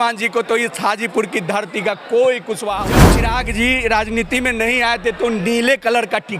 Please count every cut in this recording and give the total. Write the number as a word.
one